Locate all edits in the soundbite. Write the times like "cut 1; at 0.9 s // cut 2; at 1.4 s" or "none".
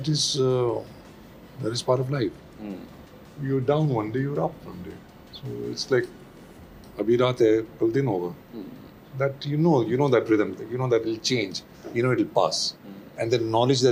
none